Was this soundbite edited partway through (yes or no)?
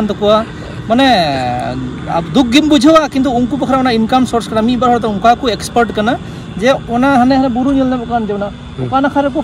no